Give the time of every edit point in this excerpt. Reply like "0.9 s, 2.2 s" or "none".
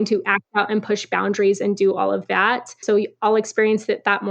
2.8 s